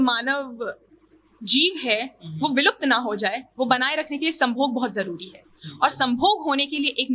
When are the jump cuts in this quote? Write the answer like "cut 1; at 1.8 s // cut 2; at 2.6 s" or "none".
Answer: none